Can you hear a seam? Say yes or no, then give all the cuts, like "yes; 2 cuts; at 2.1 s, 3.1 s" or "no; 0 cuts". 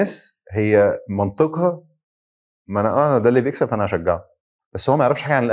no; 0 cuts